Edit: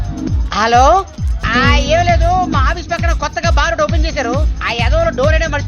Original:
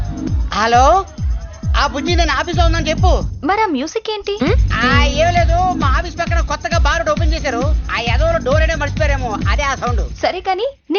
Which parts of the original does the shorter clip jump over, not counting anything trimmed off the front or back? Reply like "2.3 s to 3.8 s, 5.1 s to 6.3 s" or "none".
1.4 s to 4.7 s